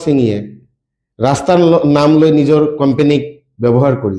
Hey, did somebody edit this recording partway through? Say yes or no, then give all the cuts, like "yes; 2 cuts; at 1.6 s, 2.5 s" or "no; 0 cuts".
no; 0 cuts